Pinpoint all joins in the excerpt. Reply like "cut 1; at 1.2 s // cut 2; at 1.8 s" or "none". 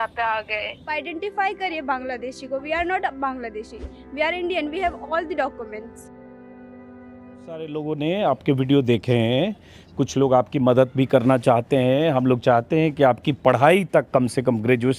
cut 1; at 0.9 s // cut 2; at 7.7 s